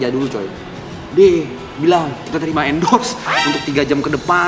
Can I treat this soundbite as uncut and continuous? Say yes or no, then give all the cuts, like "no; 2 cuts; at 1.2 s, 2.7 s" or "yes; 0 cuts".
no; 1 cut; at 0.9 s